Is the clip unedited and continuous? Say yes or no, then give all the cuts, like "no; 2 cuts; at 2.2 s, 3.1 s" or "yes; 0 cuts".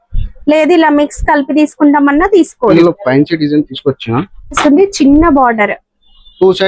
no; 2 cuts; at 2.7 s, 4.6 s